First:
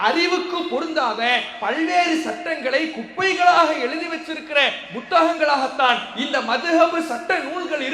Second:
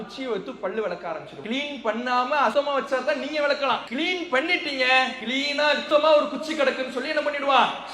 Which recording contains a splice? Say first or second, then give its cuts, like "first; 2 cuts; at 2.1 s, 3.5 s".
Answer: second; 4 cuts; at 1.3 s, 2.5 s, 3.9 s, 5.5 s